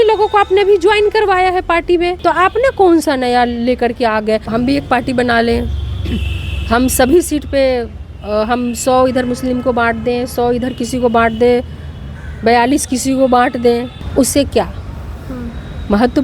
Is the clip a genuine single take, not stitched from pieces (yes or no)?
no